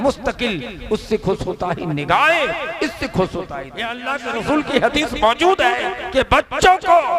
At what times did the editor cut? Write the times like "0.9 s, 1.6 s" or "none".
4.0 s, 6.0 s